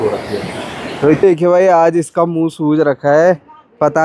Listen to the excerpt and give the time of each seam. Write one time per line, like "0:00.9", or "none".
0:01.2

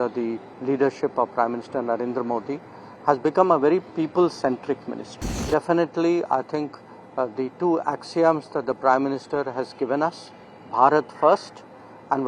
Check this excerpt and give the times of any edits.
0:05.4

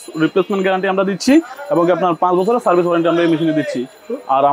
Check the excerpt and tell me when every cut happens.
none

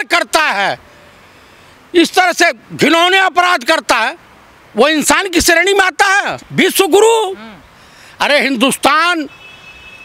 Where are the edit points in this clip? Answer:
0:06.4

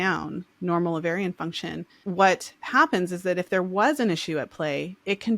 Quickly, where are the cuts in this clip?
0:01.9

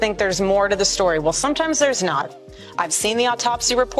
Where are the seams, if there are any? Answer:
none

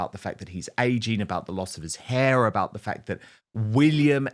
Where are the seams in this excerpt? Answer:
none

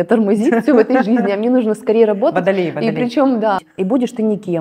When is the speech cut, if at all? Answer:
0:03.7

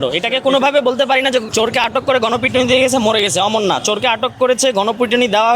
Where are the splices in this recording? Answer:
0:01.5

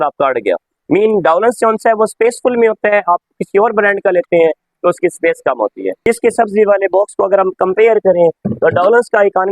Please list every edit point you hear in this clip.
0:05.9

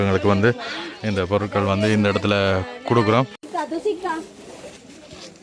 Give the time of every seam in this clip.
0:03.4

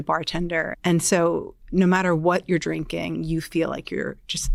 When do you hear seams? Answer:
none

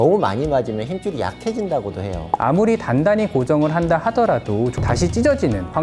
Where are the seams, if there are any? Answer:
0:02.2
0:04.7

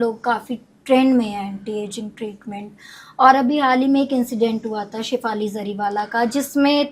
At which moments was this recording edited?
none

